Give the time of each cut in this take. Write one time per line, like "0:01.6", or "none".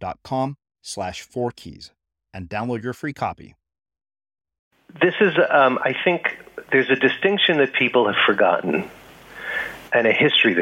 0:05.0